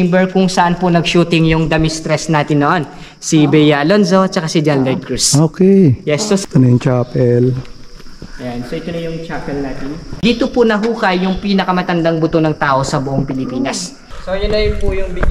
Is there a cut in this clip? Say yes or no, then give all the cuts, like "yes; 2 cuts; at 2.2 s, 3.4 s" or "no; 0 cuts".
yes; 3 cuts; at 6.4 s, 10.1 s, 13.9 s